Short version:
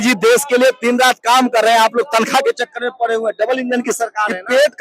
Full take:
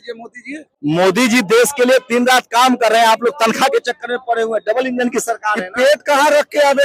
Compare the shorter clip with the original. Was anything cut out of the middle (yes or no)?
no